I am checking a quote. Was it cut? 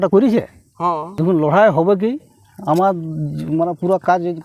yes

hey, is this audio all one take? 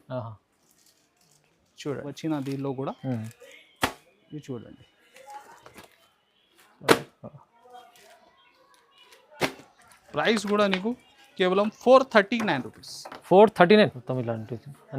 no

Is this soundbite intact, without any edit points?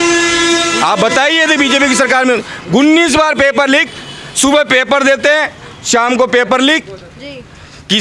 yes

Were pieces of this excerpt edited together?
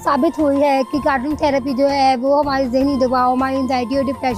no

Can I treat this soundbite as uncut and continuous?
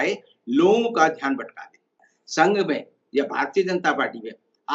no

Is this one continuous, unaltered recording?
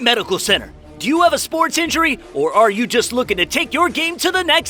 yes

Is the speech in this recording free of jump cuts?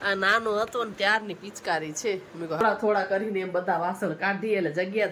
no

